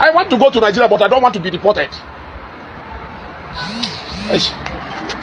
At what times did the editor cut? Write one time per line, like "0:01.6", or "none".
none